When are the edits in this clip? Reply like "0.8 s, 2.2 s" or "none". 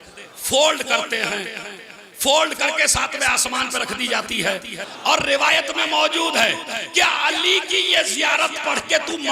4.9 s